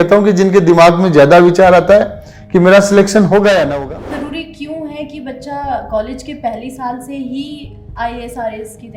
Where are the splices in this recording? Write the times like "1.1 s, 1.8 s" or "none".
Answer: 3.8 s